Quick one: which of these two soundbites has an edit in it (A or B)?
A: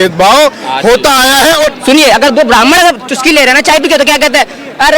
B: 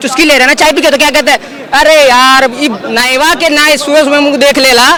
A